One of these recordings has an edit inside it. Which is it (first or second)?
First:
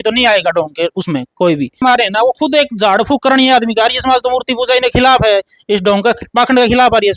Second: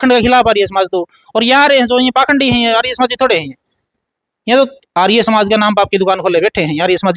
first